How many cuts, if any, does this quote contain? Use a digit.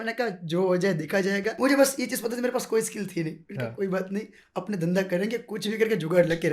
1